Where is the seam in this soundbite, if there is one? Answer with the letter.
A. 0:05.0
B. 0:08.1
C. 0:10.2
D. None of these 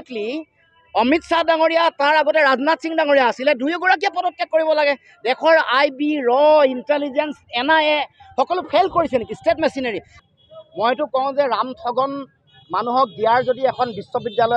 C